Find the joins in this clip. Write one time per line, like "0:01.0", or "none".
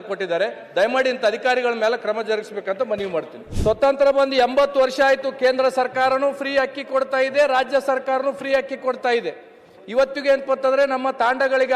0:03.4